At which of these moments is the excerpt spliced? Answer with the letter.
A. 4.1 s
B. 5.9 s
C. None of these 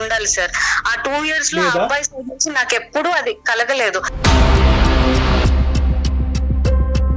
A